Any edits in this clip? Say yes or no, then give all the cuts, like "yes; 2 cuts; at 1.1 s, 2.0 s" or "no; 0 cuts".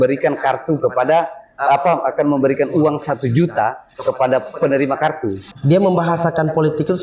yes; 1 cut; at 5.5 s